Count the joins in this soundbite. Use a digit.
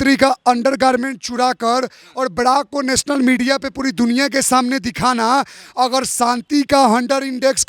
0